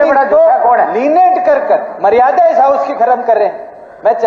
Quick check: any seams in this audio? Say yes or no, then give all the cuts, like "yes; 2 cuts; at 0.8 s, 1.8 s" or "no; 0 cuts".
no; 0 cuts